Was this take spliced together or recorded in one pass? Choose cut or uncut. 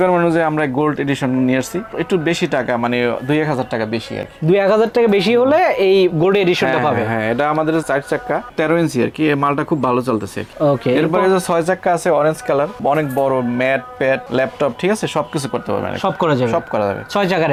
uncut